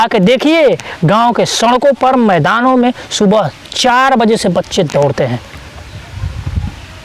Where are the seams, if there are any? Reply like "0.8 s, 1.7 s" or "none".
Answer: none